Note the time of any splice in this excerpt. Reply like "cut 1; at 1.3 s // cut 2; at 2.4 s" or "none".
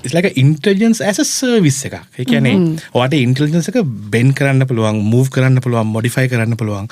none

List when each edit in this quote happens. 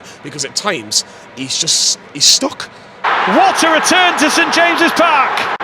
cut 1; at 2.9 s

